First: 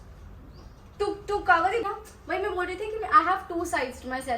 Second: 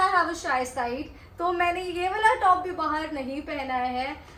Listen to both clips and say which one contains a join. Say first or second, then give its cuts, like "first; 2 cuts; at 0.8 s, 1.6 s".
first; 1 cut; at 1.9 s